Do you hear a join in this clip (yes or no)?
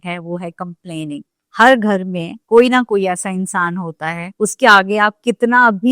yes